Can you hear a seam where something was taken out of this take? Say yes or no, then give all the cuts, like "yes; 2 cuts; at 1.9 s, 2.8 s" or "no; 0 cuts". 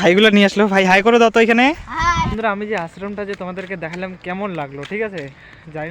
yes; 1 cut; at 2.3 s